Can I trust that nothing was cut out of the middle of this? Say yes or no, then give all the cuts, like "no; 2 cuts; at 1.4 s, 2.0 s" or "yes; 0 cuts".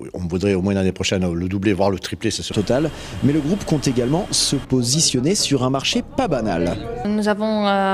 yes; 0 cuts